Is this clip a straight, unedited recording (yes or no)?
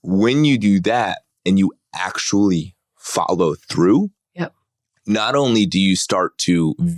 yes